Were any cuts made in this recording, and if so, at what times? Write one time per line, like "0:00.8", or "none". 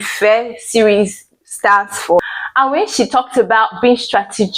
0:02.2